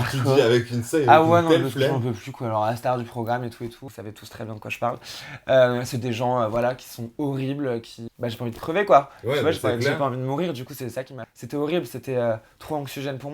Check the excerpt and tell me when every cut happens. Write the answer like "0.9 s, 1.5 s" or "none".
3.9 s, 8.0 s, 11.2 s